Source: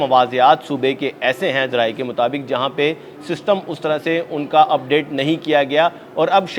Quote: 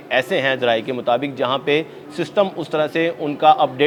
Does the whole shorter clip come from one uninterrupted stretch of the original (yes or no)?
yes